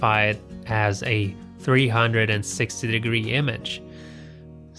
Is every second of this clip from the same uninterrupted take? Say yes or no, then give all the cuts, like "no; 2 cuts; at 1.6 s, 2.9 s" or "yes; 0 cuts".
yes; 0 cuts